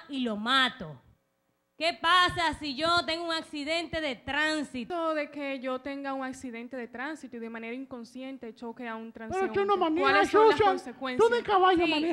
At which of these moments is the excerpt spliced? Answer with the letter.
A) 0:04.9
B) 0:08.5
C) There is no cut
A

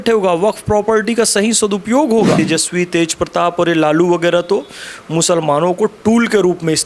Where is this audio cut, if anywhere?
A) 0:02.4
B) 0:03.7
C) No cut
A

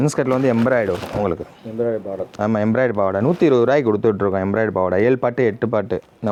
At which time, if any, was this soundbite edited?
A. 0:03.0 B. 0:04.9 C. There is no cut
C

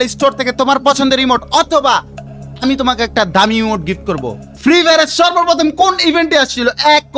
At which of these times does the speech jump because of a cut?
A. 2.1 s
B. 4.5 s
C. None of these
B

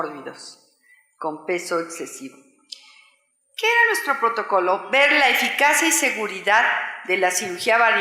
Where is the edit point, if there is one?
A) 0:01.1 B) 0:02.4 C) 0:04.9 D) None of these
C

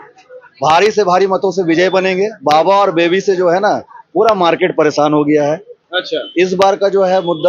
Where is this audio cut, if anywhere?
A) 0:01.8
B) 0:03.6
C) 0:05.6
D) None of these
D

